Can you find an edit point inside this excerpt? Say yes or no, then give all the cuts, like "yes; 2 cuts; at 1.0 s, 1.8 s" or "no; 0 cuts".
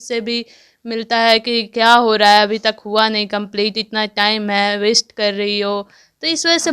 no; 0 cuts